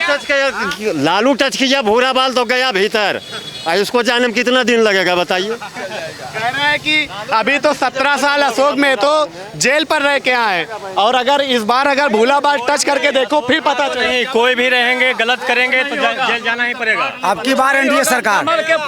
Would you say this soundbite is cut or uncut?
uncut